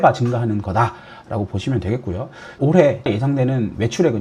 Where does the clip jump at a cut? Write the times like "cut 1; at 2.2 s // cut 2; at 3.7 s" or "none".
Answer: cut 1; at 2.4 s // cut 2; at 3.2 s